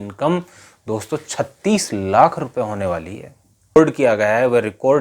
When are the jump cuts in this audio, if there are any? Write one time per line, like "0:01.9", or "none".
0:03.8